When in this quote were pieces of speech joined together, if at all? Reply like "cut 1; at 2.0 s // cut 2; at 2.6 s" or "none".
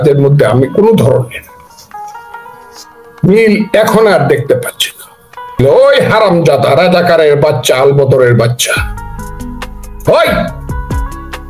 cut 1; at 5.5 s